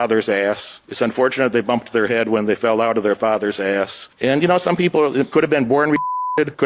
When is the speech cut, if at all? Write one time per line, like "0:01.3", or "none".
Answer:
none